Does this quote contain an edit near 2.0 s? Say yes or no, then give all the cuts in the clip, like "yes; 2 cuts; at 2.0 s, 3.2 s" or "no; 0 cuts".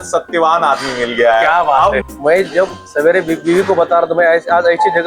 yes; 1 cut; at 2.0 s